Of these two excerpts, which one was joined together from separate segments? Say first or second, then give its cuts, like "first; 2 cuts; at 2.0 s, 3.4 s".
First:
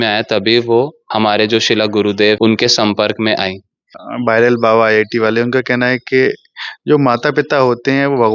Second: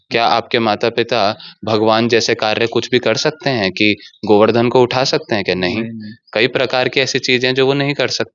first; 3 cuts; at 1.0 s, 2.4 s, 4.0 s